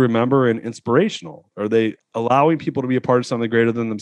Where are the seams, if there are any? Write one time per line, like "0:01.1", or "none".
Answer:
0:01.6

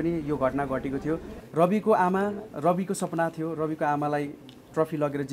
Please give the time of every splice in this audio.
0:01.4

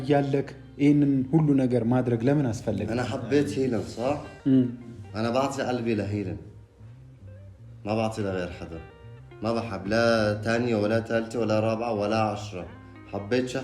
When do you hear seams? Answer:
0:02.8

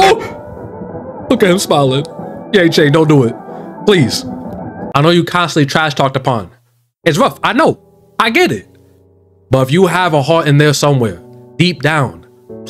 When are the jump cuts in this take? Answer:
0:01.1

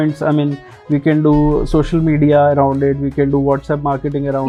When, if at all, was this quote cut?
none

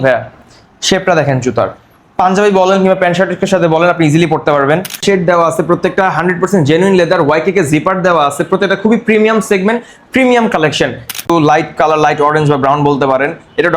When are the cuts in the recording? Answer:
0:05.0
0:11.3

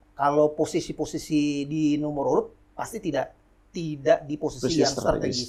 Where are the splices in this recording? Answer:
none

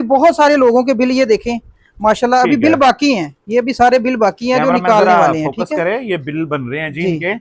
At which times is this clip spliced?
none

